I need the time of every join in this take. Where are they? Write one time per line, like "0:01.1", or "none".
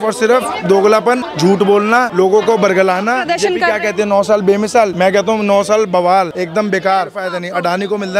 0:01.3
0:02.1
0:03.3
0:04.9
0:06.3
0:07.2

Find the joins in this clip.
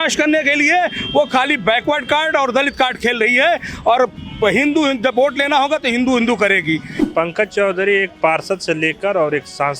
0:06.9

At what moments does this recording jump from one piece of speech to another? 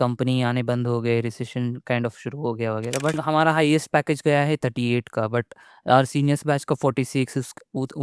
0:03.2

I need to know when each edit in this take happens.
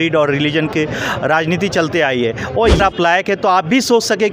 0:02.8

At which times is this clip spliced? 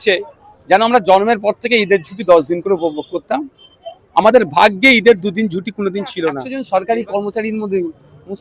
0:06.5

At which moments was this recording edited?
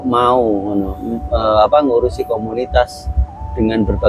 none

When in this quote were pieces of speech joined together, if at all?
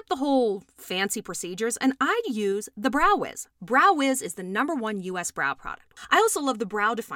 0:05.9

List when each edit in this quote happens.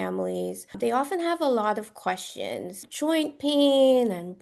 0:00.8
0:02.8

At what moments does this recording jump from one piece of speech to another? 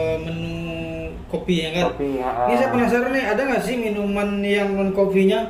none

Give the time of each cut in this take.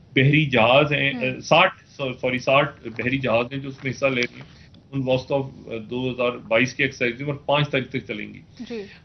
none

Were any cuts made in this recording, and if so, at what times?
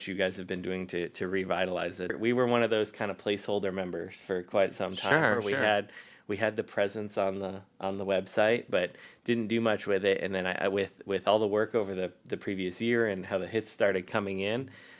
0:02.2

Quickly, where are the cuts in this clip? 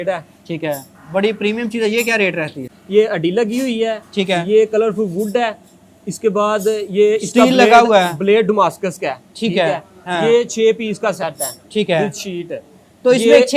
0:00.9
0:02.8

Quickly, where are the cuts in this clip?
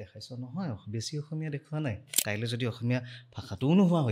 0:02.1

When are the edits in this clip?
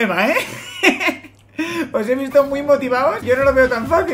0:03.2

